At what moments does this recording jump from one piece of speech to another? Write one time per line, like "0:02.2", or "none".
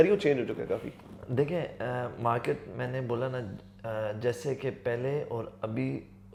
none